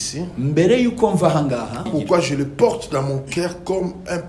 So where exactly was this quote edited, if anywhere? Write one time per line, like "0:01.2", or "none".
0:01.9